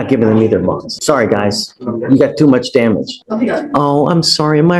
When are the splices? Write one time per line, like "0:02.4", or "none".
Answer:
0:00.9
0:03.2